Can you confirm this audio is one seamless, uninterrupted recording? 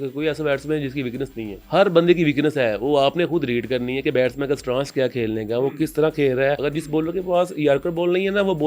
no; 2 cuts; at 1.6 s, 6.7 s

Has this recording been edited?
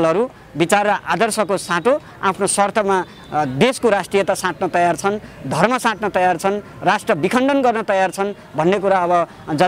no; 0 cuts

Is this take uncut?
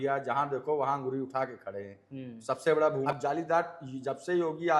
no; 1 cut; at 3.1 s

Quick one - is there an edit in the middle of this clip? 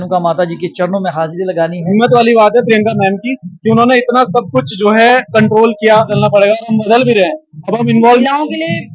yes; 3 cuts; at 1.8 s, 6.1 s, 8.2 s

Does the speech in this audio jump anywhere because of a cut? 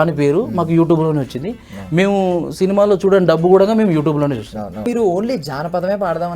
yes; 1 cut; at 4.9 s

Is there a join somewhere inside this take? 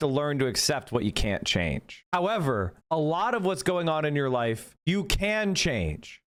no; 0 cuts

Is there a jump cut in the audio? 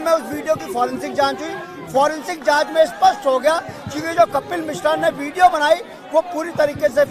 no; 0 cuts

